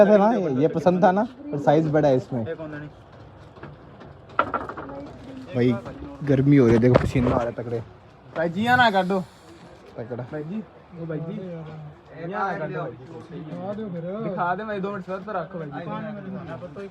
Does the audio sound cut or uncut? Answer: uncut